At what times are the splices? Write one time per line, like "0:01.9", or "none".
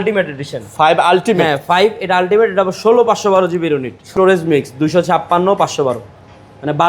0:04.1